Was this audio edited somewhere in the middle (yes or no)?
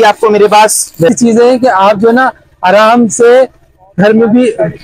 yes